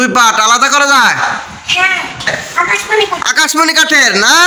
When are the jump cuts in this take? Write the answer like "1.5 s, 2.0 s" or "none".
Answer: 2.3 s